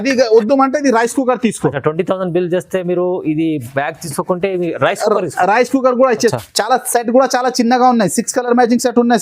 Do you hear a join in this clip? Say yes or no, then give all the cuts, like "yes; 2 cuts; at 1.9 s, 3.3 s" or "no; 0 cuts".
yes; 1 cut; at 6.3 s